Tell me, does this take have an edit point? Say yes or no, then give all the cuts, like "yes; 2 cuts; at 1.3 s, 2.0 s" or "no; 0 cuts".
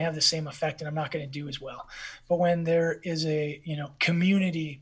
no; 0 cuts